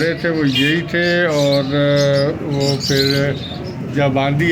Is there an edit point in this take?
no; 0 cuts

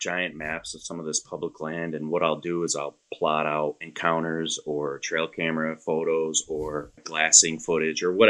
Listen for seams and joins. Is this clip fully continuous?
no; 2 cuts; at 3.9 s, 7.0 s

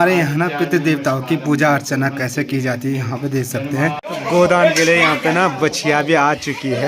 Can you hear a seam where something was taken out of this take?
yes; 1 cut; at 4.0 s

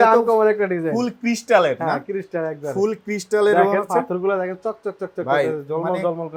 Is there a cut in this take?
no; 0 cuts

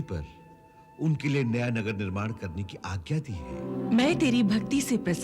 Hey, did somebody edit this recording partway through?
yes; 1 cut; at 3.6 s

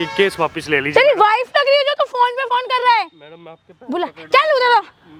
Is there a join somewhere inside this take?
no; 0 cuts

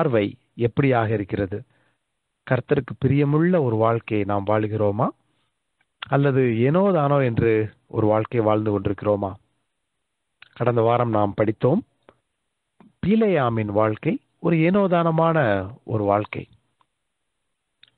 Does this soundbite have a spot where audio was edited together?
no; 0 cuts

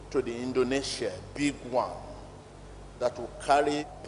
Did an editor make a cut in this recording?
no; 0 cuts

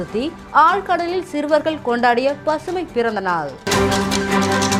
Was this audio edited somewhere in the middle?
no; 0 cuts

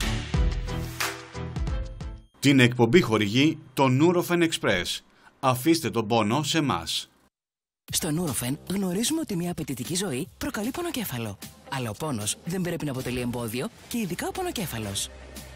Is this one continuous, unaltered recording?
no; 2 cuts; at 1.2 s, 1.9 s

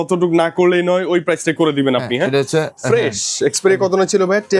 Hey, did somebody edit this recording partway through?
no; 0 cuts

